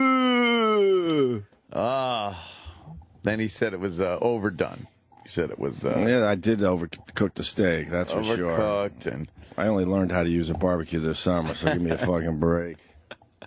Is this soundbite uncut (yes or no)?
yes